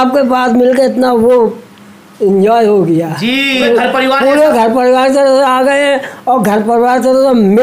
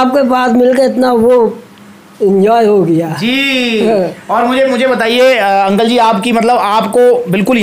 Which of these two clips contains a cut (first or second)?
first